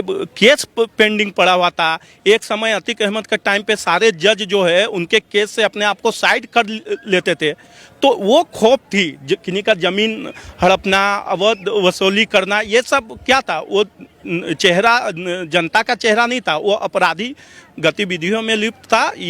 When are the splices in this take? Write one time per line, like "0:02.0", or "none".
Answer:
none